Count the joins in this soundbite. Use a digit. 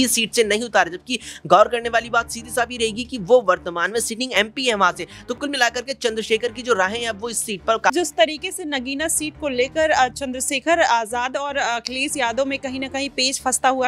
1